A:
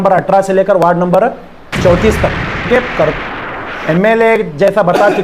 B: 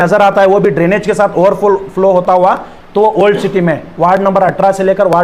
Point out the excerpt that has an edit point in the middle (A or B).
A